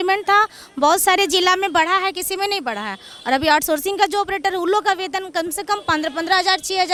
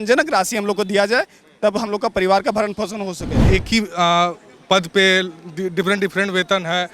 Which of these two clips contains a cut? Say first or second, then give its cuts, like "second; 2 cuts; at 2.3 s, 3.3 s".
second; 1 cut; at 3.4 s